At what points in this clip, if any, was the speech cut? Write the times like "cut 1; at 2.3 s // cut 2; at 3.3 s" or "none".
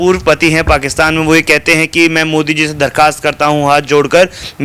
none